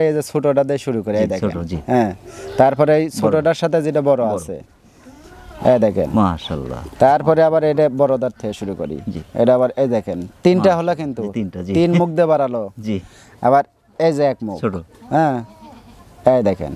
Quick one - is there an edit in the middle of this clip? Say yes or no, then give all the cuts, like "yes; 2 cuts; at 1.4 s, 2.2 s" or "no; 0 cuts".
no; 0 cuts